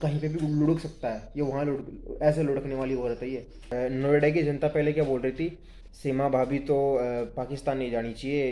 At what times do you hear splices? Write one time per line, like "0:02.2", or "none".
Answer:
0:03.7

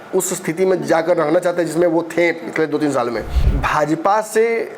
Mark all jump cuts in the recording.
0:03.5

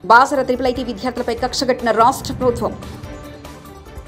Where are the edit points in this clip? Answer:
none

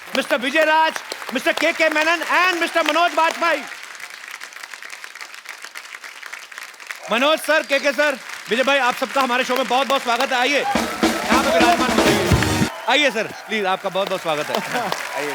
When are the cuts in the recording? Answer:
0:12.8

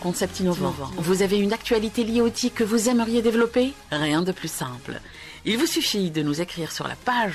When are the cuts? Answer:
none

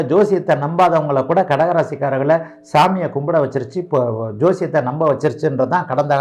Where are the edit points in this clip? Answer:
none

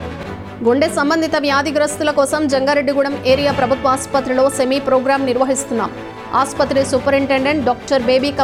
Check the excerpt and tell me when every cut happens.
none

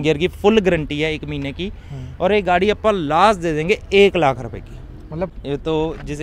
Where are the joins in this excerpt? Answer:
0:05.3

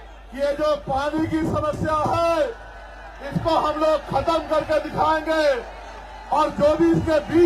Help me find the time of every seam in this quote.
none

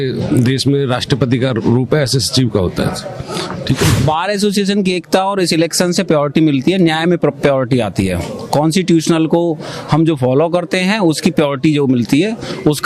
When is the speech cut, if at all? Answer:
0:04.0

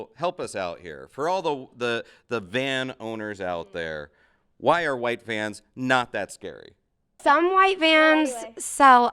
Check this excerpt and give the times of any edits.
0:07.1

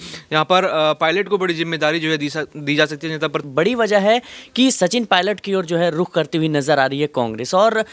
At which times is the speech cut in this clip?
0:03.5

